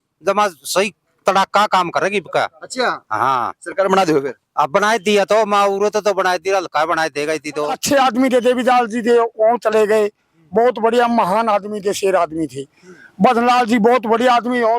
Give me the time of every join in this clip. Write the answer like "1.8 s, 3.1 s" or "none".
7.8 s